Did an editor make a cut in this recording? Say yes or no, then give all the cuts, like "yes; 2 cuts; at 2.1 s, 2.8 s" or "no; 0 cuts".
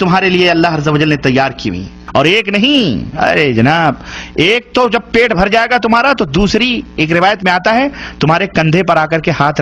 yes; 1 cut; at 1.9 s